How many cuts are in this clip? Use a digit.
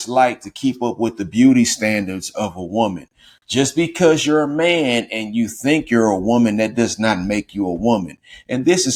0